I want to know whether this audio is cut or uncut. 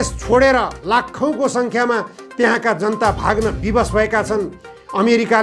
uncut